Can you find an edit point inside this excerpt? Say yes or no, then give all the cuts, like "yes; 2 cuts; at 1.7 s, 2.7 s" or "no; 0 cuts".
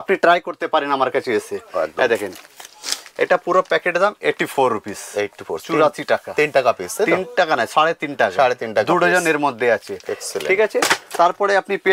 no; 0 cuts